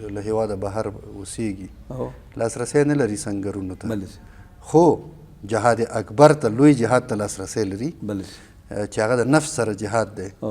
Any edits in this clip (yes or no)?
no